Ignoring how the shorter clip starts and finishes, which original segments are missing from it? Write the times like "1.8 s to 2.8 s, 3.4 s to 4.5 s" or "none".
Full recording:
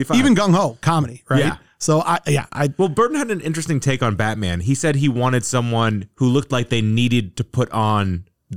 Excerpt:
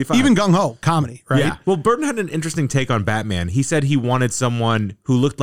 1.6 s to 2.7 s